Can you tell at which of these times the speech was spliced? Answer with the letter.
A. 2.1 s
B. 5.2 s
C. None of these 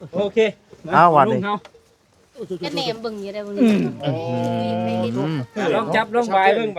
C